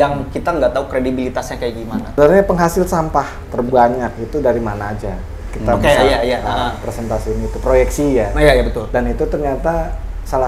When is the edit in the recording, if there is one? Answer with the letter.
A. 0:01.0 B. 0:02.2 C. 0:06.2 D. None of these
B